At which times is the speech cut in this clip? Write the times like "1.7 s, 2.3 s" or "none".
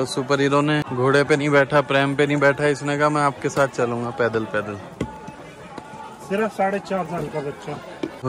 none